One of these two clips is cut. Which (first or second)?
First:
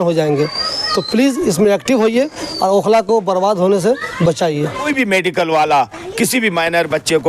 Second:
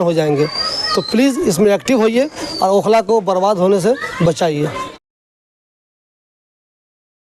first